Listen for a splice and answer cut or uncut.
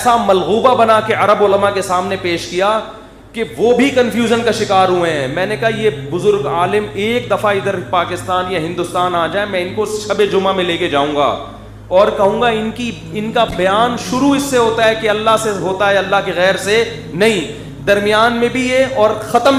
uncut